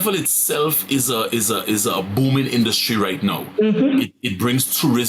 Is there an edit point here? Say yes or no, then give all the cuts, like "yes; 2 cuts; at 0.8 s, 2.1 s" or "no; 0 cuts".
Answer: no; 0 cuts